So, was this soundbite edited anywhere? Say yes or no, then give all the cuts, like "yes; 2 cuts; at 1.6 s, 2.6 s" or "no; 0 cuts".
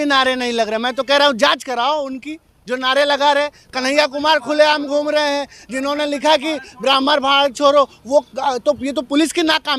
no; 0 cuts